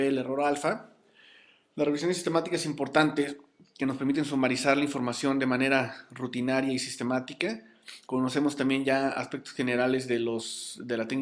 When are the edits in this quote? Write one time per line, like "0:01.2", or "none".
none